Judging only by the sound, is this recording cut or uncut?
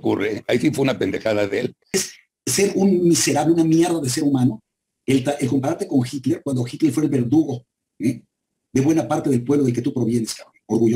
cut